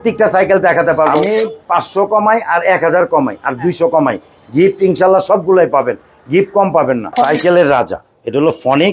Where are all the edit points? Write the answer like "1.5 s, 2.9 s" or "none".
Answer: 1.1 s, 7.1 s